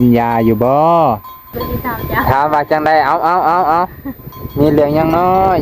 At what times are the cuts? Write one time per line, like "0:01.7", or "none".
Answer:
0:01.7

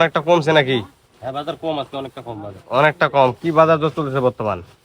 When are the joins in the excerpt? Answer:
none

